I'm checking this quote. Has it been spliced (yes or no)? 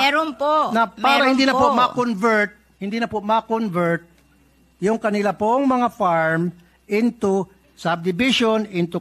no